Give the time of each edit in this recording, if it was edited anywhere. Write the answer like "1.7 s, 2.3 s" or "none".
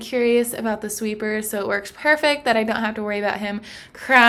none